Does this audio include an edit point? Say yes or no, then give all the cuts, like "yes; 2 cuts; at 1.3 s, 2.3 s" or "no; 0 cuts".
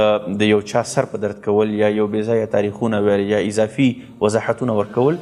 no; 0 cuts